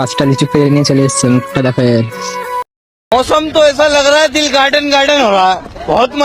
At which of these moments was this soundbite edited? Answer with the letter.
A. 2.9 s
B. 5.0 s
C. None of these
C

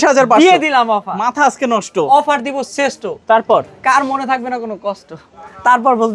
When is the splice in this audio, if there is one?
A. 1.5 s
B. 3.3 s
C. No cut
C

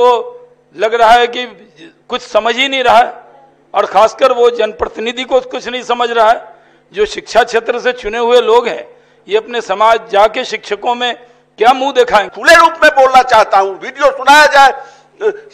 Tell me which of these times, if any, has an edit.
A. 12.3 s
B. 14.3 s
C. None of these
A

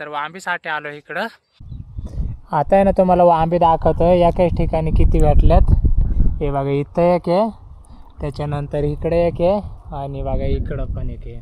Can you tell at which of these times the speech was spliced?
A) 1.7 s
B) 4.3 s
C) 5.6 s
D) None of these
A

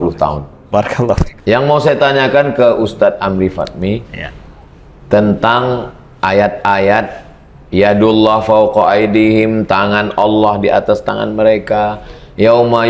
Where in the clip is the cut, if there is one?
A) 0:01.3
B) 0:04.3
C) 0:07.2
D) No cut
A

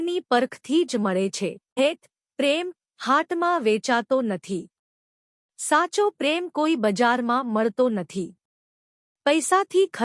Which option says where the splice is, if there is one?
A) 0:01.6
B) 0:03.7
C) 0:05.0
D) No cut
A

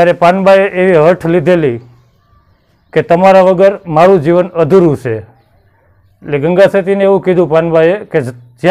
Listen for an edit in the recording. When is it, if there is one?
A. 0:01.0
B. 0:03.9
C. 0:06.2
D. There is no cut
D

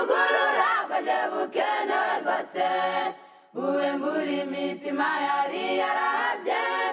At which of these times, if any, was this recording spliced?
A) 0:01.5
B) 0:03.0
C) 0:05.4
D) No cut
B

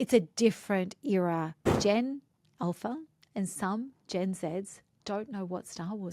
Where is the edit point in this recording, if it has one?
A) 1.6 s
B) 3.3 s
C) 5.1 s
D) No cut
A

